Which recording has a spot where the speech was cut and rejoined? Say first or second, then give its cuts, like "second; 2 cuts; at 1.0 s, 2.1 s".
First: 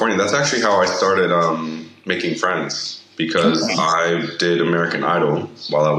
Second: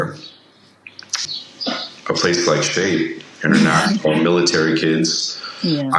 second; 1 cut; at 1.1 s